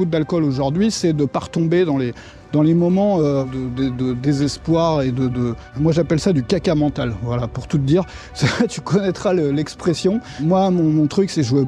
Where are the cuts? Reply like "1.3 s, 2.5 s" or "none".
3.5 s, 5.6 s, 10.4 s